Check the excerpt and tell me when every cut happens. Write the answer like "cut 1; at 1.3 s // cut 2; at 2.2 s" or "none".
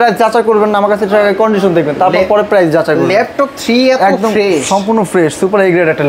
none